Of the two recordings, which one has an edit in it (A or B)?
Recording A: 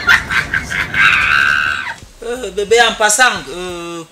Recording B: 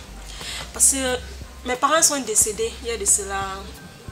A